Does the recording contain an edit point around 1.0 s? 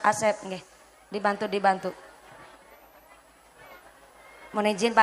no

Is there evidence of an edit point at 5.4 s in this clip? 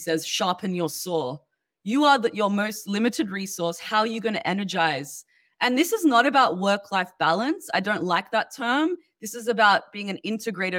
yes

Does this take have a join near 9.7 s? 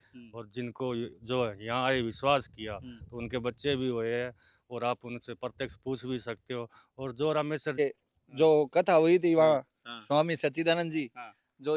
no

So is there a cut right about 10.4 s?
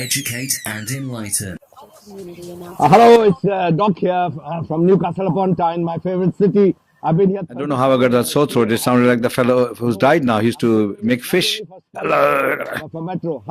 yes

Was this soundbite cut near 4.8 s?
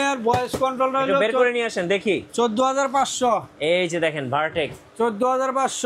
no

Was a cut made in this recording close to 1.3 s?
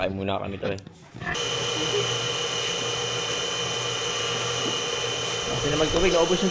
yes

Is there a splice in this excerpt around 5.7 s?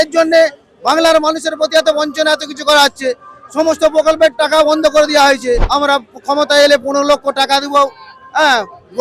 yes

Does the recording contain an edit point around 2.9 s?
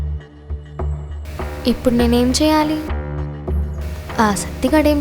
yes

